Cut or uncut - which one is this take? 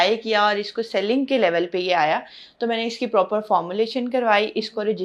uncut